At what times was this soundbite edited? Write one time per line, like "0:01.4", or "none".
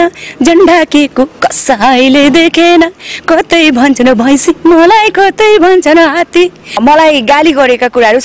0:06.8